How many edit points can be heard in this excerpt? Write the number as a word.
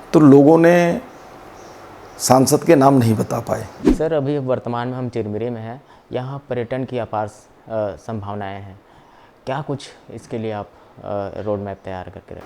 one